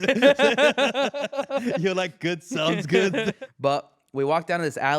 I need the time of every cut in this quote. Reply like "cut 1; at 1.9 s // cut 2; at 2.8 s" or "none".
cut 1; at 3.4 s